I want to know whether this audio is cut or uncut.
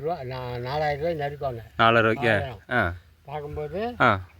uncut